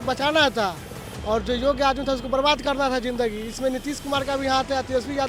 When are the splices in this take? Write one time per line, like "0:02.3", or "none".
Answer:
none